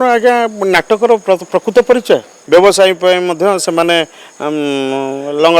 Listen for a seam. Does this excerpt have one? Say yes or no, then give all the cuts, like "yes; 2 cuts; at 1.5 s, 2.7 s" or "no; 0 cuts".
yes; 1 cut; at 2.3 s